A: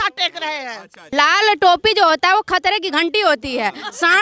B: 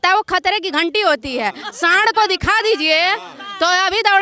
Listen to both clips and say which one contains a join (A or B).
A